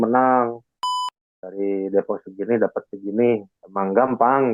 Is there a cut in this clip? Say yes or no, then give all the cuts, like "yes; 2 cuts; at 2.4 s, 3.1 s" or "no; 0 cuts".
yes; 1 cut; at 0.9 s